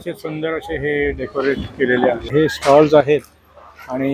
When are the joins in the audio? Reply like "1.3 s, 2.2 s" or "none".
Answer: 2.3 s